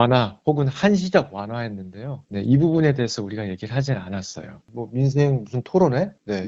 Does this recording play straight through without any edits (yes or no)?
no